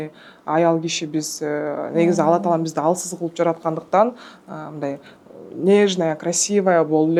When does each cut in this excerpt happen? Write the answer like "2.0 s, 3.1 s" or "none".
none

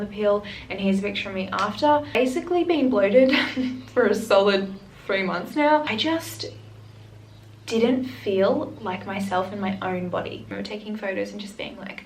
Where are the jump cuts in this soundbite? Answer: 2.2 s, 5.9 s, 10.4 s

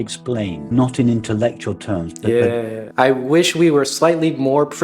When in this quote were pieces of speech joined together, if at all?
2.8 s

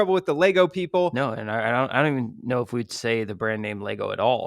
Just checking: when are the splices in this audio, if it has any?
1.1 s

